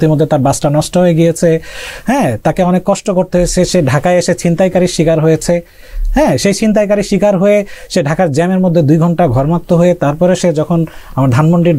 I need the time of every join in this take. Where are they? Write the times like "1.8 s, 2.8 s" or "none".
none